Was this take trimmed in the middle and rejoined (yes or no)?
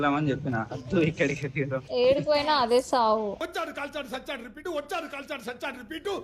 no